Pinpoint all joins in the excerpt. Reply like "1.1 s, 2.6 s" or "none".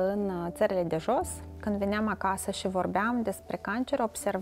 1.5 s